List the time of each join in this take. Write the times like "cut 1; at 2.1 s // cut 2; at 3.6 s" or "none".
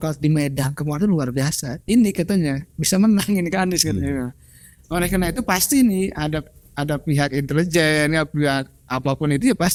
none